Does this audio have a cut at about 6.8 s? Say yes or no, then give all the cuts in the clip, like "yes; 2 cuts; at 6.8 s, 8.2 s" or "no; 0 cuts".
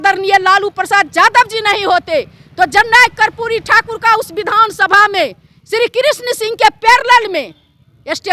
no; 0 cuts